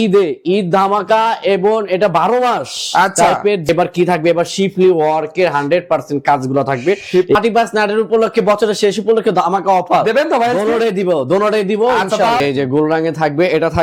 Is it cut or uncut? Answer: cut